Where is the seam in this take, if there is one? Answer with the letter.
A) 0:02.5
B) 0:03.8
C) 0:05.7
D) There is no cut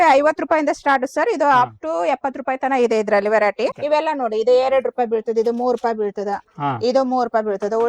B